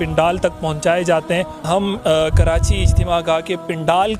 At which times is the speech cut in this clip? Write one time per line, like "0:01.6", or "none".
0:01.6

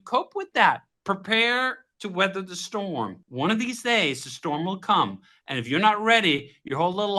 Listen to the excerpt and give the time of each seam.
0:00.9
0:03.2

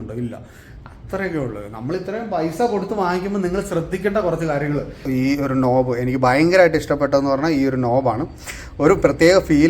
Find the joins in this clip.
0:05.0

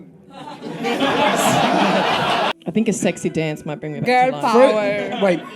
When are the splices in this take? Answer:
0:02.5

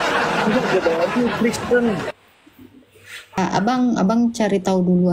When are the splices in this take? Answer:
0:03.4

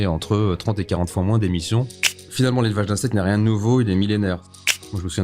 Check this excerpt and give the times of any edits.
0:02.1
0:04.4

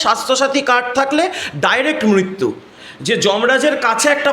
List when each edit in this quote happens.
0:02.7

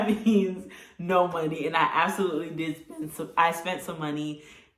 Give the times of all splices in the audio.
none

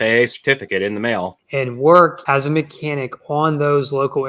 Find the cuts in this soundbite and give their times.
0:01.4
0:02.2

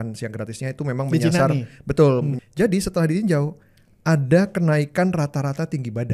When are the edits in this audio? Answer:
0:02.4

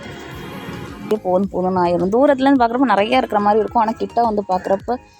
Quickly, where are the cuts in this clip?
0:01.1

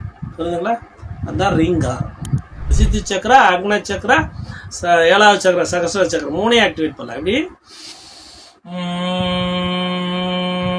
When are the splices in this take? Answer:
0:02.8

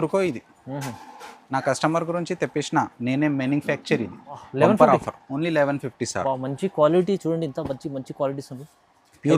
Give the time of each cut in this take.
0:04.5

